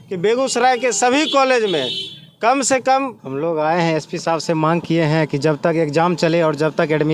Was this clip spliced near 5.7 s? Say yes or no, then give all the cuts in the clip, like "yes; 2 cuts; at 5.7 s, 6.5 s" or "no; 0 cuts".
no; 1 cut; at 3.2 s